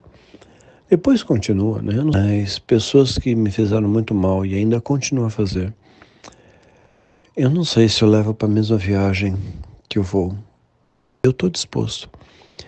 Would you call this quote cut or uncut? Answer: cut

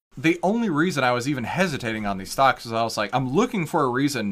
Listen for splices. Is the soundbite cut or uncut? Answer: uncut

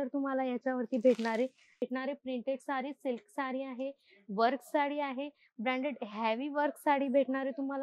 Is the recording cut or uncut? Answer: cut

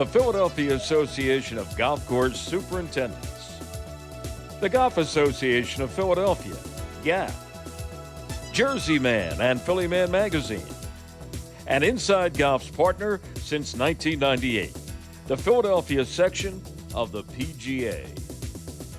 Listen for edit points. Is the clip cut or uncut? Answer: cut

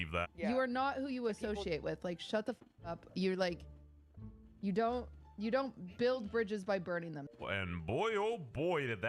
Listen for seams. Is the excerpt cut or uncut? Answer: uncut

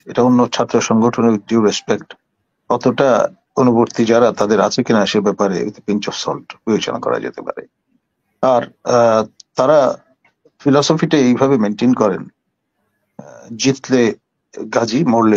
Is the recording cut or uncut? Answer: uncut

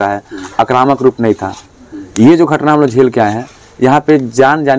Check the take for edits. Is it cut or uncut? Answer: uncut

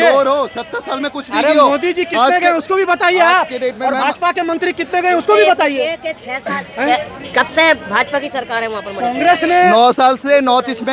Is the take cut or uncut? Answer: uncut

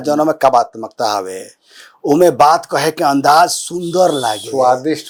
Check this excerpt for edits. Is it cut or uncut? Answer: uncut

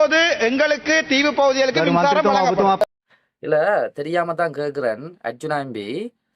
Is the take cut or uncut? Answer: cut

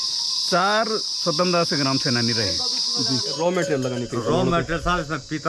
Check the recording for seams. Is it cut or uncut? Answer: cut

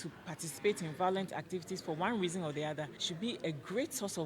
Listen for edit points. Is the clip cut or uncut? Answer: cut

